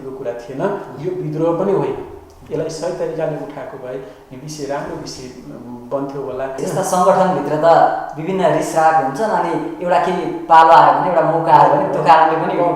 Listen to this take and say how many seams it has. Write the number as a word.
one